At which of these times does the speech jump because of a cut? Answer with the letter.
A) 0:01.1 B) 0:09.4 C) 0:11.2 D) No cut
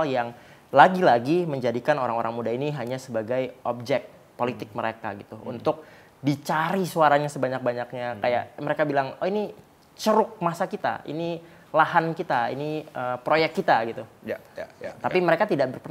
D